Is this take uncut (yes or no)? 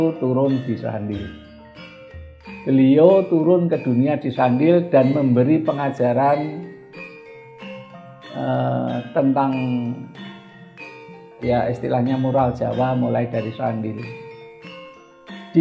yes